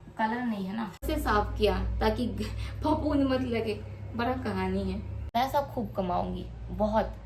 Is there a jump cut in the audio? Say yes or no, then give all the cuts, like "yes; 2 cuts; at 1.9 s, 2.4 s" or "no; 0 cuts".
yes; 2 cuts; at 1.0 s, 5.1 s